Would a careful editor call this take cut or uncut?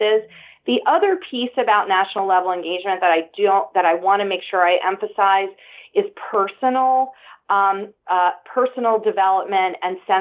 uncut